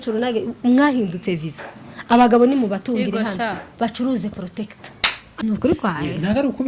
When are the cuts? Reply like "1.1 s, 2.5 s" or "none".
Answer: 5.3 s